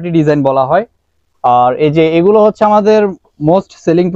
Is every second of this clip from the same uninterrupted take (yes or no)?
yes